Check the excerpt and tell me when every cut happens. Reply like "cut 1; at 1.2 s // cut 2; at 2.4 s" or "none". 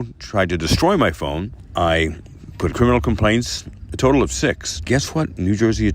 cut 1; at 1.6 s // cut 2; at 2.7 s // cut 3; at 4.9 s